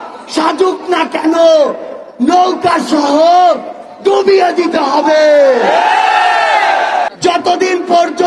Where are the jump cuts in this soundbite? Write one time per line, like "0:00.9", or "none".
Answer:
0:07.1